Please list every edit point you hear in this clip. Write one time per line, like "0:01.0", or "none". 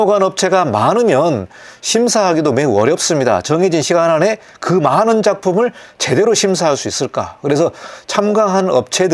none

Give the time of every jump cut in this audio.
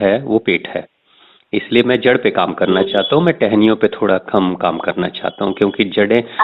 none

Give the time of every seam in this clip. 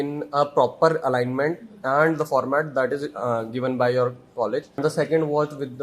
0:04.8

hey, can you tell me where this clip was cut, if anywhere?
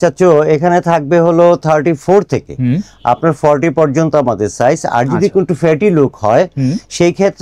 none

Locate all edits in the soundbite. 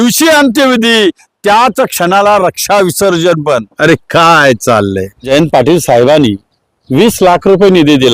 0:03.7
0:05.2

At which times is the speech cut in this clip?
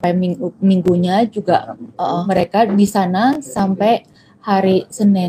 0:02.3

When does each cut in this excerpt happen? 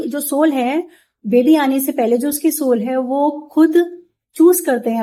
none

